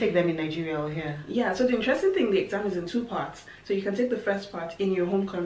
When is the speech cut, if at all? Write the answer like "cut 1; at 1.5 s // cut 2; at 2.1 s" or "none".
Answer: none